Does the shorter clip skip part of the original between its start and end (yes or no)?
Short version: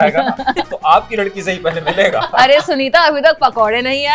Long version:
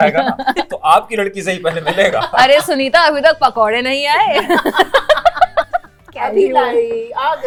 no